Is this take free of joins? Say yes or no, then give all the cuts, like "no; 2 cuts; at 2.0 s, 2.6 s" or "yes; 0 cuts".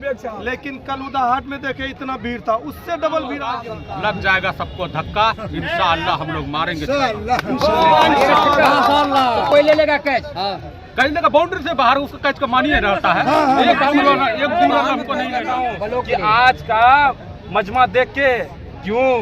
no; 2 cuts; at 3.6 s, 15.4 s